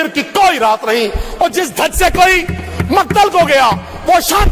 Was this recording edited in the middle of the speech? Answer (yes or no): no